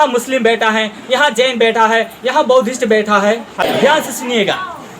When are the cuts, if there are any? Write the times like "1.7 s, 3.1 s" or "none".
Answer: 3.6 s